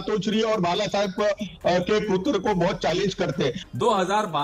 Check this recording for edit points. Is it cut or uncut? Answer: cut